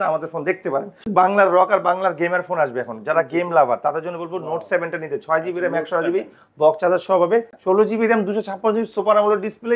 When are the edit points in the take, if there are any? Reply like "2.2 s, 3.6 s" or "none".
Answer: 1.1 s, 7.5 s